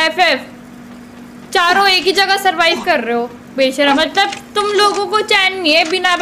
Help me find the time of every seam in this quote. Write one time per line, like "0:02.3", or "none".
0:04.0